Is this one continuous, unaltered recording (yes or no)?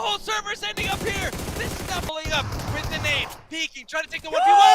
no